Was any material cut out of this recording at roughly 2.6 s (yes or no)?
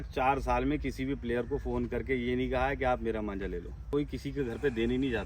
no